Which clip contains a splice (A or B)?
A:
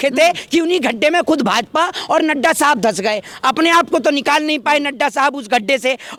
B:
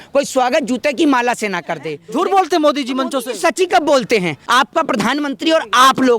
B